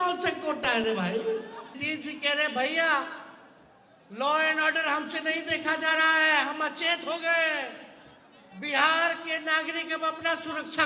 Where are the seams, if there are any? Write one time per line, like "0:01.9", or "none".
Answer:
0:01.8